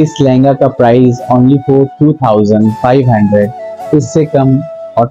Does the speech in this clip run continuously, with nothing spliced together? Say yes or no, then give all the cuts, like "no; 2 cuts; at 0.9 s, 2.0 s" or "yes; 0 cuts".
yes; 0 cuts